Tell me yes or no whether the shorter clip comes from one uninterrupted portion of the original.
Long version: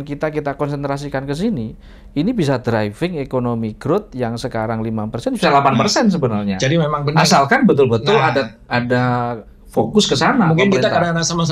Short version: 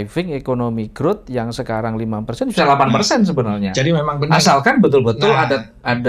yes